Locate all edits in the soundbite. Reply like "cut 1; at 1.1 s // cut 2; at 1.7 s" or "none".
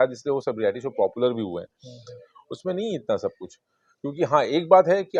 none